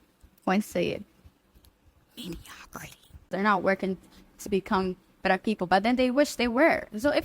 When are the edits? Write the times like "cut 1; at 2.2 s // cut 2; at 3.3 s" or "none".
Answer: cut 1; at 3.4 s